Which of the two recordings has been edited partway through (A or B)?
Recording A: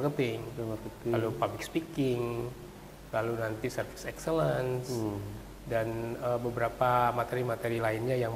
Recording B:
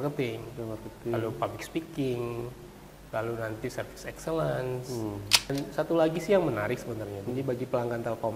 B